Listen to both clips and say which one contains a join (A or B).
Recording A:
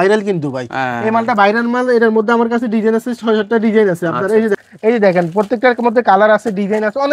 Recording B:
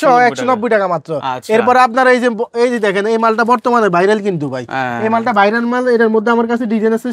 A